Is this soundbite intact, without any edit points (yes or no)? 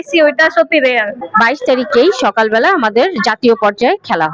no